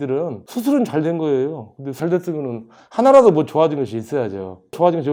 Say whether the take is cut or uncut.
uncut